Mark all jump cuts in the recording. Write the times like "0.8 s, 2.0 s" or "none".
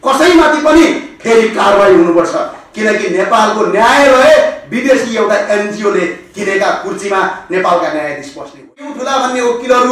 9.0 s